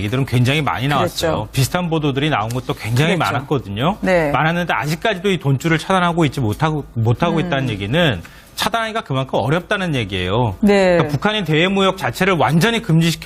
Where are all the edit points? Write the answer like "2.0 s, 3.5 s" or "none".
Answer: 1.4 s